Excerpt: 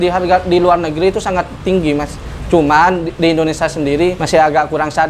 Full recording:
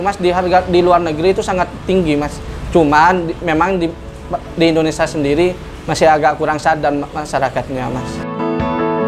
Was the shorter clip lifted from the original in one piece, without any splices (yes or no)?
no